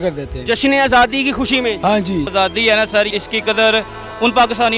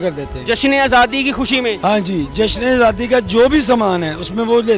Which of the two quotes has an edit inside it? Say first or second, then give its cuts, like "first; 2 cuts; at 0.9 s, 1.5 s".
first; 2 cuts; at 2.3 s, 3.1 s